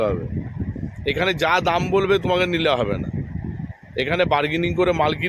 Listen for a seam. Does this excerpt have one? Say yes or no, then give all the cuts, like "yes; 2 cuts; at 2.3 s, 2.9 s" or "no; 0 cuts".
no; 0 cuts